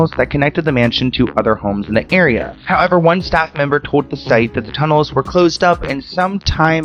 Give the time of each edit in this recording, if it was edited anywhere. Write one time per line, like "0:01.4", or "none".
none